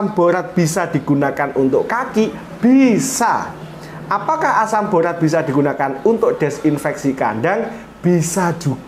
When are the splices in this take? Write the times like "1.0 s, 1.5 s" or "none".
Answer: none

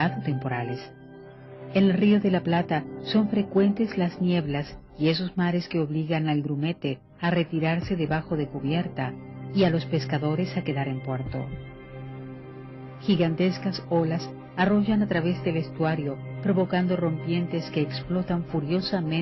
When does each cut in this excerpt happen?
2.9 s

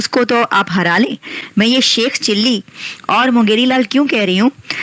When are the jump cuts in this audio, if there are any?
none

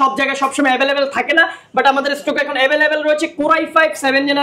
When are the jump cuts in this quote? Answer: none

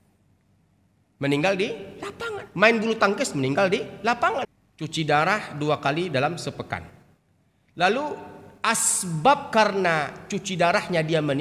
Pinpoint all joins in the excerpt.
4.5 s

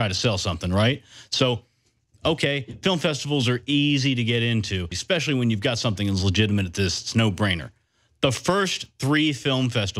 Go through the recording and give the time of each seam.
5.0 s

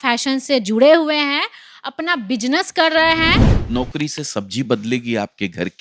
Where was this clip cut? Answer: 3.4 s

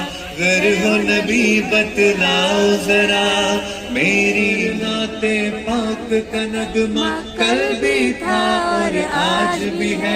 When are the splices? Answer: 4.7 s

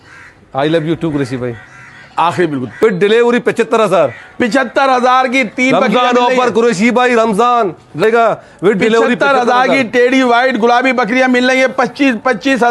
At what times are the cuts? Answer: 2.8 s, 8.0 s

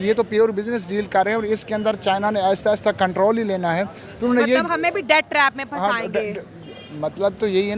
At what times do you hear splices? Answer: none

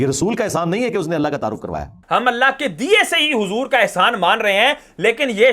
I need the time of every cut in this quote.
2.0 s

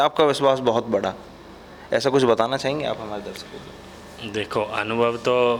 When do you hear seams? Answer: none

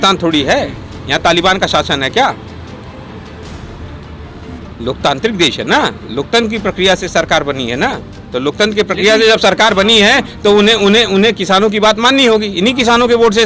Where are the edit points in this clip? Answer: none

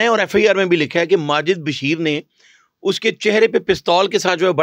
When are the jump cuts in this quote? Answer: none

